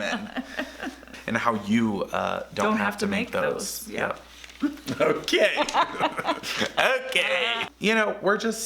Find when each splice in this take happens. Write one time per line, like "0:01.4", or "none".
0:01.1
0:07.7